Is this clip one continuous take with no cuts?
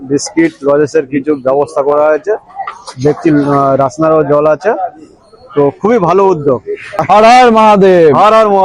no; 1 cut; at 7.0 s

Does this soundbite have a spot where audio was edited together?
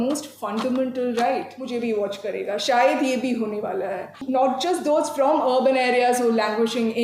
yes; 2 cuts; at 1.6 s, 4.2 s

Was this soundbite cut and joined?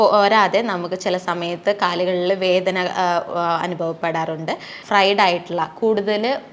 yes; 1 cut; at 4.7 s

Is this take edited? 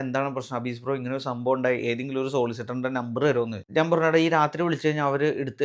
yes; 1 cut; at 3.7 s

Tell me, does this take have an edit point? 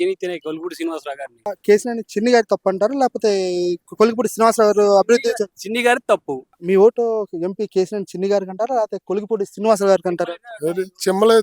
yes; 2 cuts; at 1.5 s, 6.5 s

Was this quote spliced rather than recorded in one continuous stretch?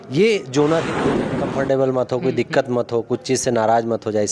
yes; 1 cut; at 1.5 s

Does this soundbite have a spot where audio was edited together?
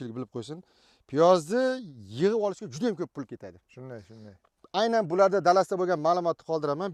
no; 0 cuts

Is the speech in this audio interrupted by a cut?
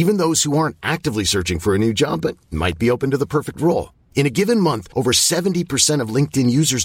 no; 0 cuts

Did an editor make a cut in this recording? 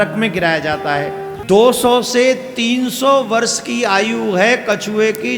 yes; 1 cut; at 1.3 s

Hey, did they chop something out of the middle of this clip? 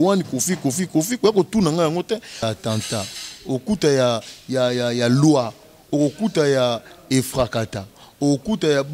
yes; 1 cut; at 2.4 s

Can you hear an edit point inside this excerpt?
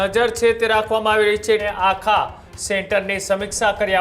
yes; 1 cut; at 1.6 s

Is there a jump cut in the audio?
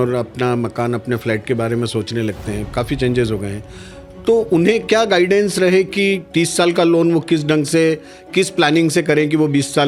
no; 0 cuts

